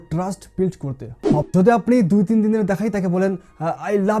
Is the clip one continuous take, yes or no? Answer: no